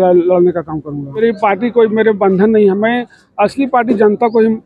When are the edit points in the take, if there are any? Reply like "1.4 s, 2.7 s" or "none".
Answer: 1.2 s